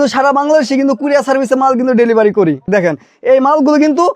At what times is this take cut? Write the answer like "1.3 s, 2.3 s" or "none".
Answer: 2.6 s